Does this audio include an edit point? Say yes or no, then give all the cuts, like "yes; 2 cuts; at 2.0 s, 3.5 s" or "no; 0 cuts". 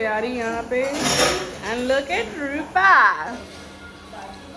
no; 0 cuts